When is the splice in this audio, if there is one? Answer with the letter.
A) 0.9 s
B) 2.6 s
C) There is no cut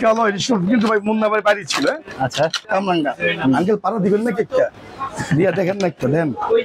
B